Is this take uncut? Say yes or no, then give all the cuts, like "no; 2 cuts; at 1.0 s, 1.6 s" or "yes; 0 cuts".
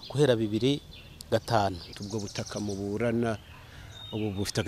no; 1 cut; at 1.9 s